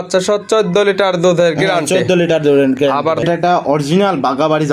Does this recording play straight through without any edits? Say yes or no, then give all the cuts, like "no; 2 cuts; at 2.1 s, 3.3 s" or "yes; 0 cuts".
no; 1 cut; at 3.2 s